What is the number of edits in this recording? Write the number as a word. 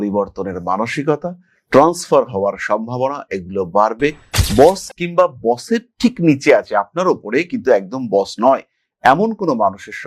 zero